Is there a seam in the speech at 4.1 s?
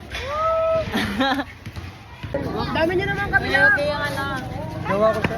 no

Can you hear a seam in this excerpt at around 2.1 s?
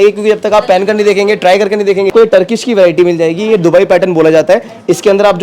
yes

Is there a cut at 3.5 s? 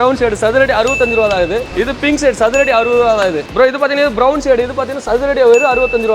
no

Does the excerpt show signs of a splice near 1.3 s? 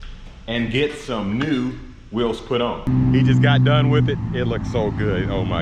no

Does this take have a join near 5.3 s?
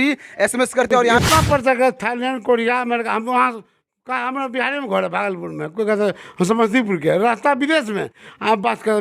no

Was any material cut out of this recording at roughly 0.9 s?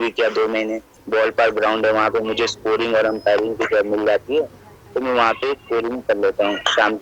yes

